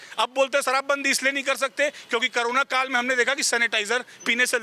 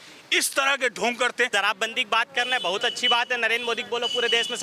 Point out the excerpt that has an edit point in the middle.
second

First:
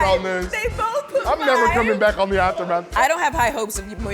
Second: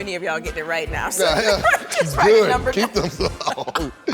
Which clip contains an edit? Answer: first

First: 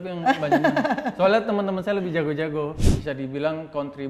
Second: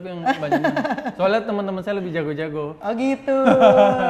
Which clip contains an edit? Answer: first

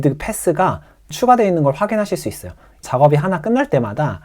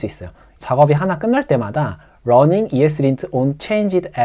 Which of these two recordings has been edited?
first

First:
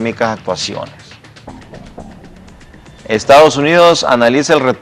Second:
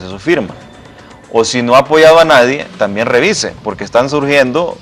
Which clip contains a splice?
second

